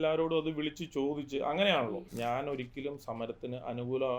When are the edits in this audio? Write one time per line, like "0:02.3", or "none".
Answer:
0:02.1